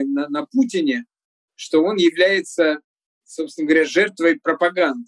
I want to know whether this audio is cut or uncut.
uncut